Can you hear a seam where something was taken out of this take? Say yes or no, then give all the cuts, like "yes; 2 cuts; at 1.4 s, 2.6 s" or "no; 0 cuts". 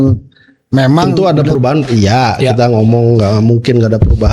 yes; 1 cut; at 1.1 s